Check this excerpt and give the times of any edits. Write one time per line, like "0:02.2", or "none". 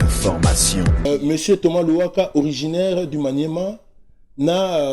0:01.1